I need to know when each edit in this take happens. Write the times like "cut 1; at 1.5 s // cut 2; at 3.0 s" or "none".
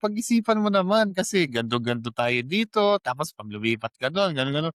none